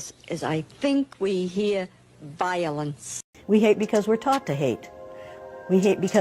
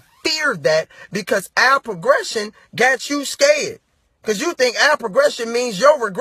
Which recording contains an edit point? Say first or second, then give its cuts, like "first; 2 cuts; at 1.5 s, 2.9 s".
first; 1 cut; at 3.4 s